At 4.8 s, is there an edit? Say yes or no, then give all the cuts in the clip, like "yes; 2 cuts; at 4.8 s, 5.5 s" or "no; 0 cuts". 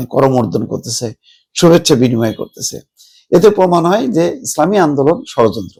no; 0 cuts